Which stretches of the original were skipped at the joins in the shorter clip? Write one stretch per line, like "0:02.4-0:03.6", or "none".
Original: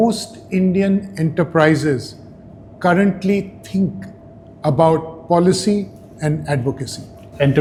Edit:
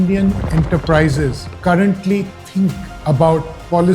0:02.1-0:02.6
0:04.1-0:04.5

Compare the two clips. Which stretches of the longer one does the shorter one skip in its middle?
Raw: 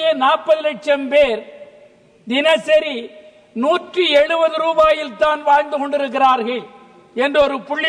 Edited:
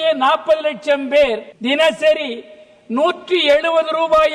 0:01.5-0:02.2

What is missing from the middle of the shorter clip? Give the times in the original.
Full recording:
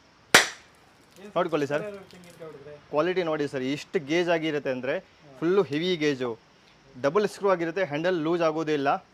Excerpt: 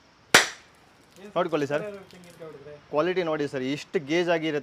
none

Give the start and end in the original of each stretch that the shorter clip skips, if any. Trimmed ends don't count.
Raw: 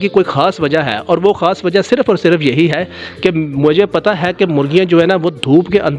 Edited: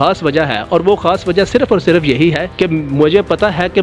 0:02.8-0:03.1

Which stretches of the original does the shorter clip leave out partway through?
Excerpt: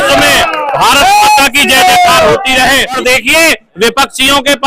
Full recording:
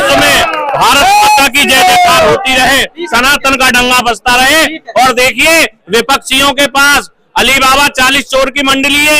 0:03.0-0:05.1

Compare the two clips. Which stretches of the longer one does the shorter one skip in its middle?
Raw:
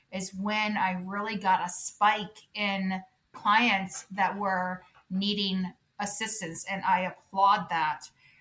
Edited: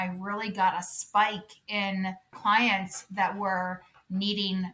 0:03.1-0:03.3

